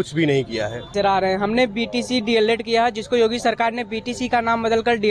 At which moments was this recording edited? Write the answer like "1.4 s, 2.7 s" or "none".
0.9 s